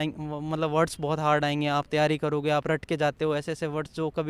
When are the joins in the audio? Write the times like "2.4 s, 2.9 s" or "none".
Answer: none